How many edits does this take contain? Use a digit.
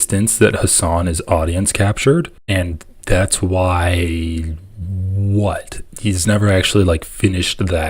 1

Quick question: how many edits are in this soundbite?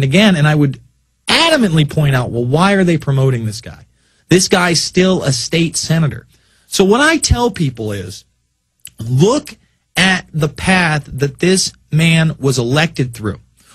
0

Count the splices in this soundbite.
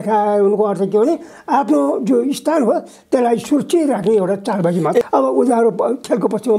1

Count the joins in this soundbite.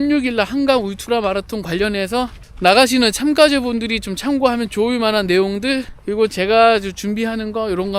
2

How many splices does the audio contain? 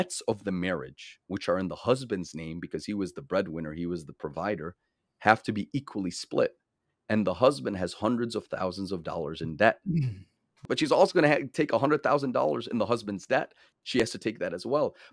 1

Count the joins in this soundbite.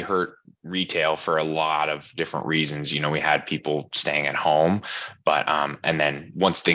0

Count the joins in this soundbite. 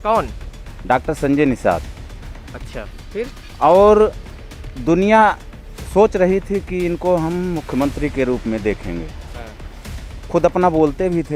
0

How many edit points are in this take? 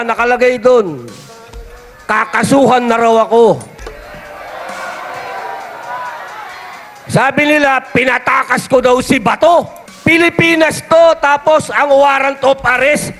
1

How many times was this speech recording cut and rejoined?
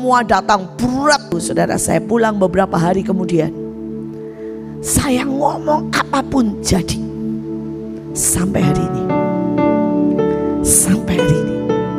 1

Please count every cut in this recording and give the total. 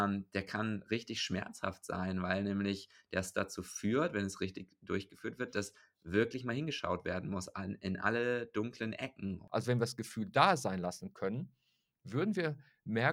1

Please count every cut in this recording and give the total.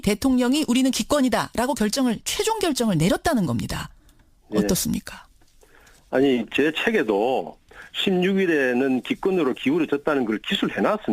1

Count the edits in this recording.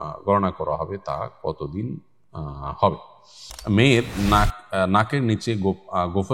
1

